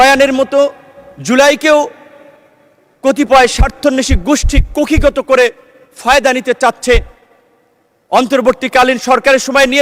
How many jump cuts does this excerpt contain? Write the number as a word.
zero